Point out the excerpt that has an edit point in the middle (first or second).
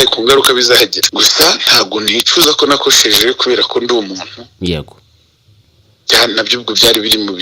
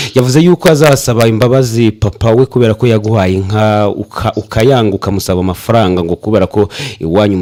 first